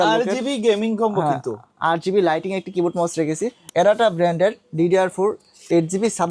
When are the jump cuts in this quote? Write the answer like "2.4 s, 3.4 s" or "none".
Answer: 3.6 s